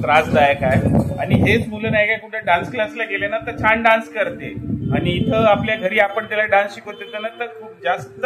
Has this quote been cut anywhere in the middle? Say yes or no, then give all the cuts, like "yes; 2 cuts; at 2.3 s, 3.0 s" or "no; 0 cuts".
no; 0 cuts